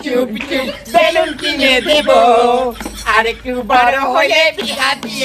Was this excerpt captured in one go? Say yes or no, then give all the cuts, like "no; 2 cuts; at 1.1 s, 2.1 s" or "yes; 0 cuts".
yes; 0 cuts